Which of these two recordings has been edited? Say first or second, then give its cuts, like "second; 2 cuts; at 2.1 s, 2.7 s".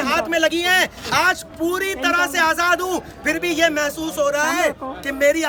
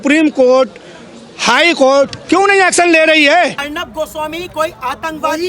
second; 1 cut; at 3.6 s